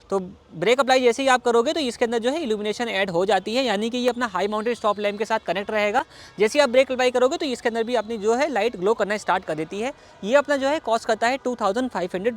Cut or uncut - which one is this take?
uncut